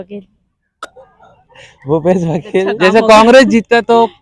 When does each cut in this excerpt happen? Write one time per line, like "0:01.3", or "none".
0:02.6